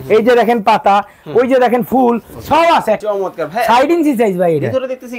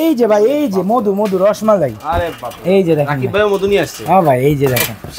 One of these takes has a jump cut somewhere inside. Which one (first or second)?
first